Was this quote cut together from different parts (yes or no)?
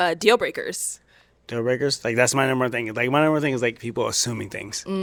no